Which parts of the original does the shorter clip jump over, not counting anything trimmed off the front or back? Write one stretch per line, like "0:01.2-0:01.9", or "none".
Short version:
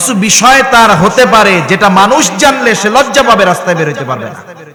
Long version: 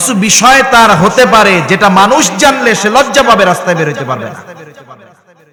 none